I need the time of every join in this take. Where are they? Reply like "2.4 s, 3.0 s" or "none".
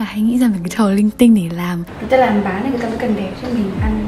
1.9 s